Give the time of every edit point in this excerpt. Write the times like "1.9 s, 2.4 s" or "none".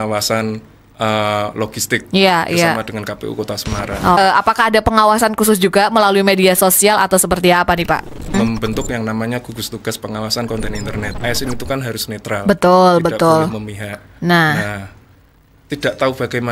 4.2 s, 8.3 s, 11.2 s